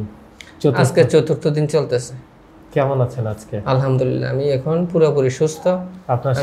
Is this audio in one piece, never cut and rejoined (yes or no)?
yes